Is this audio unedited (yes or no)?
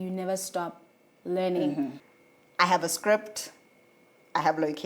no